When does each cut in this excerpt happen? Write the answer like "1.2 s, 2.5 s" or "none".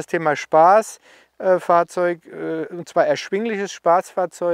none